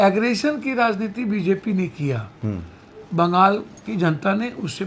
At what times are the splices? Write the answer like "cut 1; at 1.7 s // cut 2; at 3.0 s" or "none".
none